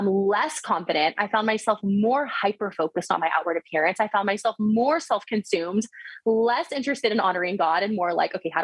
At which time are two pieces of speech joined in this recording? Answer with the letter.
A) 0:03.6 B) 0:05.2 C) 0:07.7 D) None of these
D